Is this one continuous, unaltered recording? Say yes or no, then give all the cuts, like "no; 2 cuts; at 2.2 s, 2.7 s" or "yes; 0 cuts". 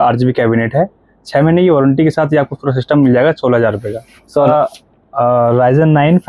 no; 1 cut; at 4.4 s